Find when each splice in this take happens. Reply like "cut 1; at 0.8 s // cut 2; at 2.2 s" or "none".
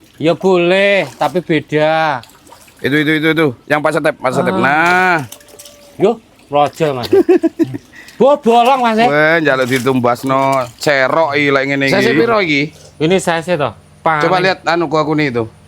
cut 1; at 12.2 s